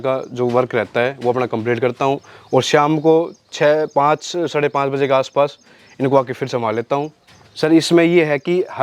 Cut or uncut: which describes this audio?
cut